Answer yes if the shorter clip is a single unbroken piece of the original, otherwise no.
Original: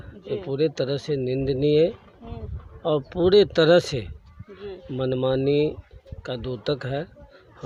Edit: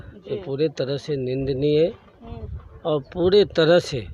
yes